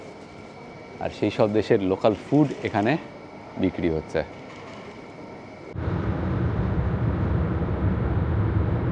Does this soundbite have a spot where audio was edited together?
no; 0 cuts

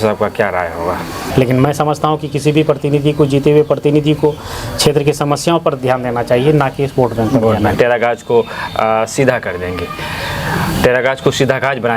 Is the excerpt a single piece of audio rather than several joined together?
no; 2 cuts; at 1.2 s, 7.7 s

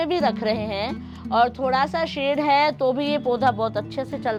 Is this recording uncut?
yes; 0 cuts

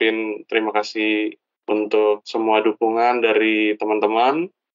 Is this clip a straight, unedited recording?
yes; 0 cuts

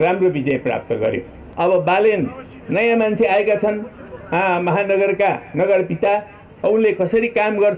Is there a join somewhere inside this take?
yes; 1 cut; at 1.4 s

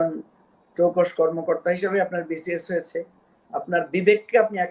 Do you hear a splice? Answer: no; 0 cuts

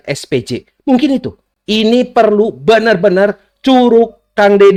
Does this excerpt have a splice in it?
no; 0 cuts

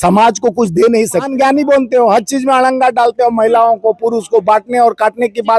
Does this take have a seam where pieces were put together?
yes; 1 cut; at 1.3 s

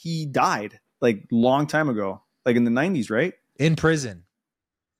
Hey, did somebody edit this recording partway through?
no; 0 cuts

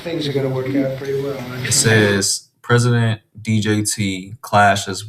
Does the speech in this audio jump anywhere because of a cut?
no; 0 cuts

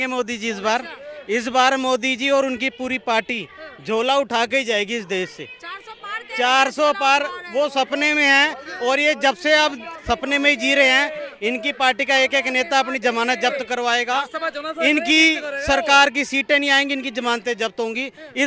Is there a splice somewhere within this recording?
no; 0 cuts

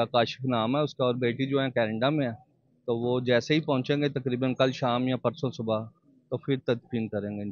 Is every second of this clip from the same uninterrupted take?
yes; 0 cuts

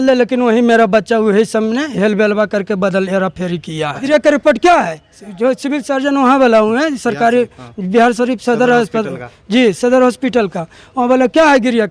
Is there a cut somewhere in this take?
yes; 1 cut; at 4.0 s

